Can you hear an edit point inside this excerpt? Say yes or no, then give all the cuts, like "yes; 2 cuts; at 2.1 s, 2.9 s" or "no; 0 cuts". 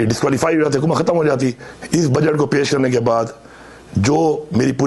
yes; 1 cut; at 1.7 s